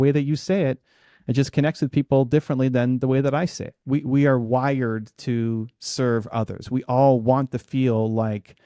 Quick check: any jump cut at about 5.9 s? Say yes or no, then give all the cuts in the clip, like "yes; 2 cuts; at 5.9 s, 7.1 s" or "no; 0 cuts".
no; 1 cut; at 3.7 s